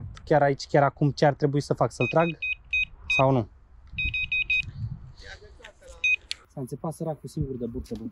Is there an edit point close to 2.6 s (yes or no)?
no